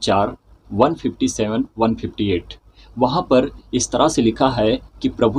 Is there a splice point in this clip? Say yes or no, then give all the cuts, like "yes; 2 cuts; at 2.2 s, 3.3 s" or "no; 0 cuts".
no; 0 cuts